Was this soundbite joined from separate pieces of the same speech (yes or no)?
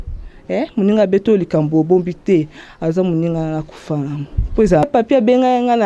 yes